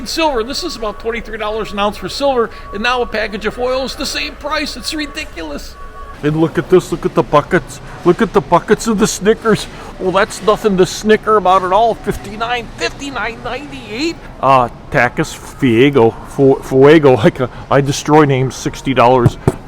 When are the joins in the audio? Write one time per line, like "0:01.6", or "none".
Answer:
0:06.1
0:14.3